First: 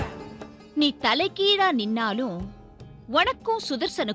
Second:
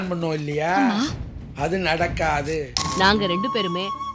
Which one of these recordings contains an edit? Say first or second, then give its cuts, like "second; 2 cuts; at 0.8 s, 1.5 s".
second; 1 cut; at 2.8 s